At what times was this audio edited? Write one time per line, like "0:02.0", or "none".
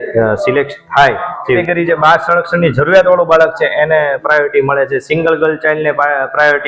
0:01.6